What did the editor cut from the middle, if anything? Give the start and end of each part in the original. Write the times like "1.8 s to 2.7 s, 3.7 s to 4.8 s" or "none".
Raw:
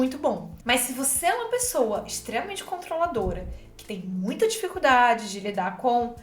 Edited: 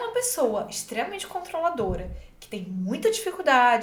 none